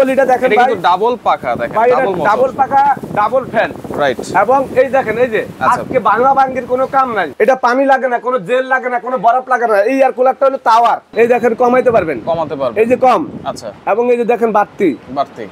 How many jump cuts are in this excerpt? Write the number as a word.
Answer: two